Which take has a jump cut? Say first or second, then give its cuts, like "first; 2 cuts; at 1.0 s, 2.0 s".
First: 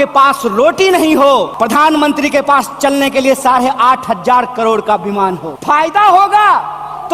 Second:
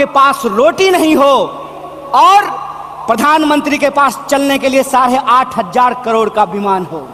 first; 2 cuts; at 1.5 s, 5.5 s